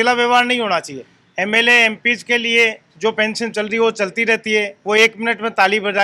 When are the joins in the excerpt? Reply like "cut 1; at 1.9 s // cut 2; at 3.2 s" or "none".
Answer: none